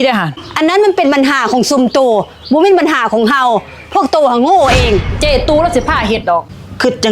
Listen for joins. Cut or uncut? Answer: cut